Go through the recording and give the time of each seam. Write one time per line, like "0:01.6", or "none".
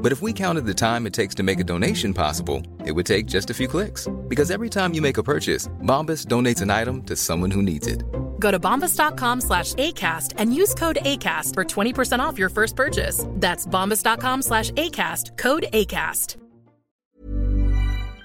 0:17.0

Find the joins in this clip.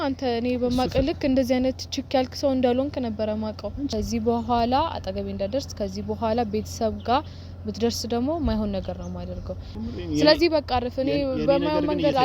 0:03.9
0:09.7

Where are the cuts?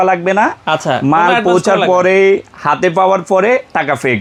none

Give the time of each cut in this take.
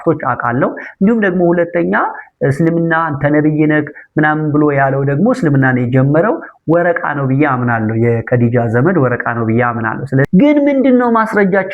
0:10.3

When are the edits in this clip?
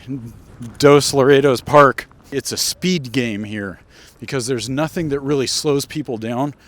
0:02.3

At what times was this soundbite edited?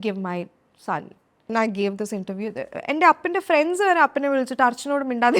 0:01.5

